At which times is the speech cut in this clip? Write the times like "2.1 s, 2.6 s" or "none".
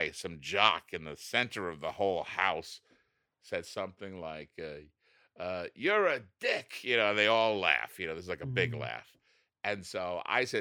none